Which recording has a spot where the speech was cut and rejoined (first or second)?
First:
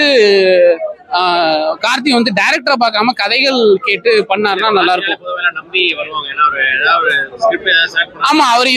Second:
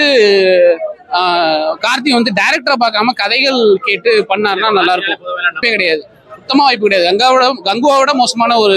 second